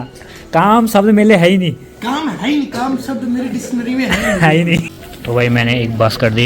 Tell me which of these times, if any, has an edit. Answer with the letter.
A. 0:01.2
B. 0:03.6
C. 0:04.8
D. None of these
C